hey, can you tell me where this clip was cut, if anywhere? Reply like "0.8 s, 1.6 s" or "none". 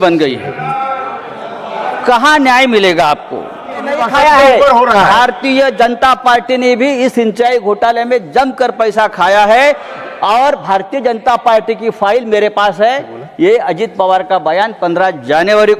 4.0 s